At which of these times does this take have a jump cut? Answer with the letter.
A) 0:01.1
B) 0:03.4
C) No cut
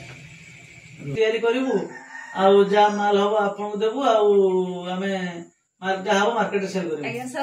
A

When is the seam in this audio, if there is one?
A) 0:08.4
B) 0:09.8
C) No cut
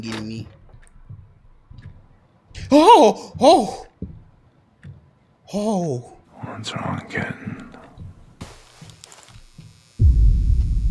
A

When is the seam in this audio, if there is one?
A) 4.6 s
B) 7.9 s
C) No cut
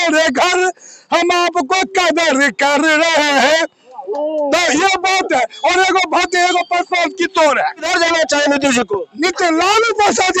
B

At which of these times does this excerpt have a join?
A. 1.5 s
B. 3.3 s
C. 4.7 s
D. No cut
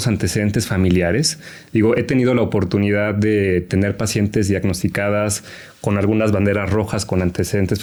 D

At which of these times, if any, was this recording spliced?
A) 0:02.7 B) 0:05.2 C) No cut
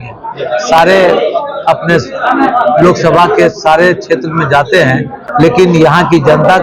B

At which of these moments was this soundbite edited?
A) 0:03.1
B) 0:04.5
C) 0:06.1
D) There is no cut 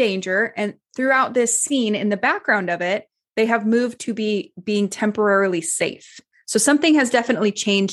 C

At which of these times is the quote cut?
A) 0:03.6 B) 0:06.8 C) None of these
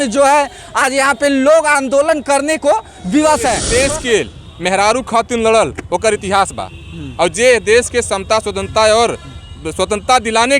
A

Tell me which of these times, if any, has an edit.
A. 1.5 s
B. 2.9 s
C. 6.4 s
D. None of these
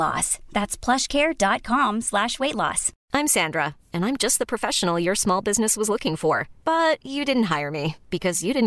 B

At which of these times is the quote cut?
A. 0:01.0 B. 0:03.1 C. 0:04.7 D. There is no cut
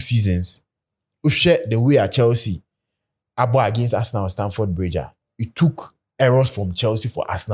D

